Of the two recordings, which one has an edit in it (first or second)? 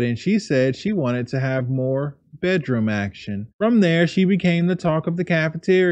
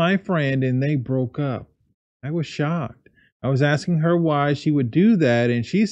first